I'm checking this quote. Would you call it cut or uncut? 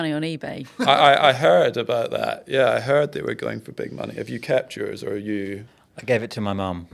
uncut